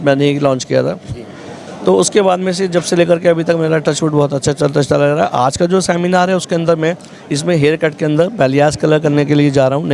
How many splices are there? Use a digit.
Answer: 0